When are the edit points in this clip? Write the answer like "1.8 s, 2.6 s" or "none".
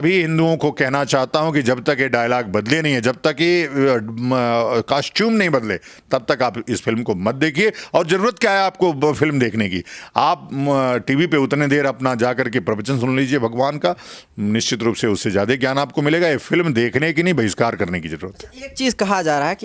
none